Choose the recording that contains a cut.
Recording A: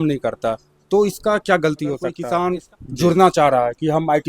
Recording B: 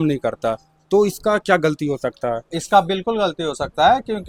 A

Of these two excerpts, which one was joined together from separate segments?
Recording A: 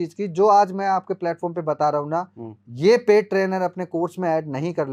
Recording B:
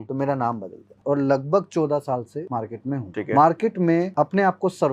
B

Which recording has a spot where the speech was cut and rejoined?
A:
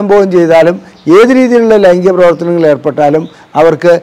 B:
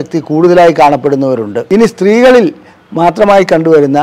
B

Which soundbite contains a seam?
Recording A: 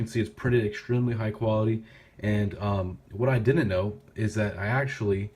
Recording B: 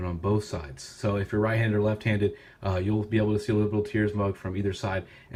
A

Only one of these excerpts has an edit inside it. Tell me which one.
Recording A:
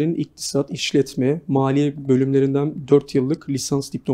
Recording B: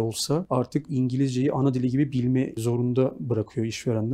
B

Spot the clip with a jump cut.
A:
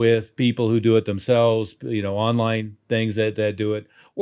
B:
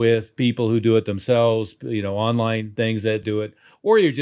B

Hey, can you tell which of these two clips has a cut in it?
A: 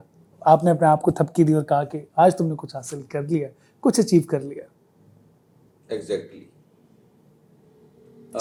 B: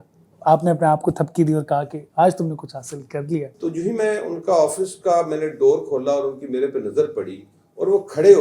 B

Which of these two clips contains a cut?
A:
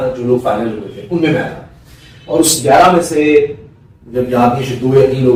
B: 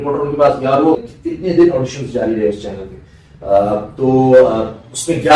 B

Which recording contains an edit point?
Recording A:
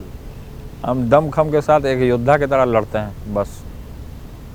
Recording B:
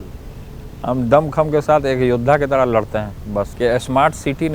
B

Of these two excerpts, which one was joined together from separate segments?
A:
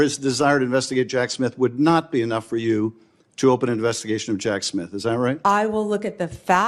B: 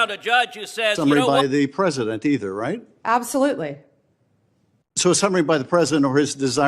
B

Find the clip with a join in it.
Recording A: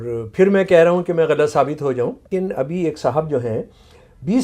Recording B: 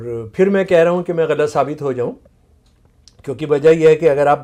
A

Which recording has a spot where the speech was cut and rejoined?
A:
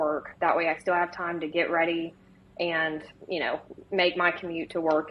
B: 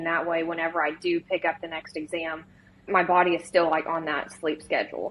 B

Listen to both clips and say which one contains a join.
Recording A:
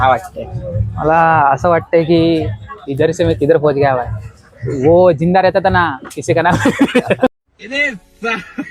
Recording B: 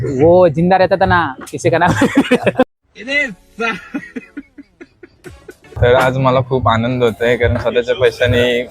B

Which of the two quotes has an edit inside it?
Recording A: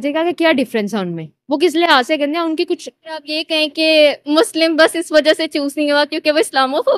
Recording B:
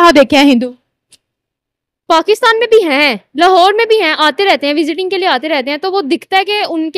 A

